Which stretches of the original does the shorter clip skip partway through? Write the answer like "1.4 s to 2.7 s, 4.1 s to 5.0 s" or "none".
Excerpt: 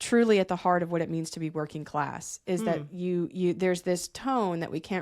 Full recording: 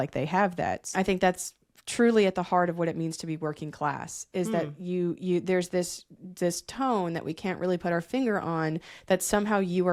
6.0 s to 6.7 s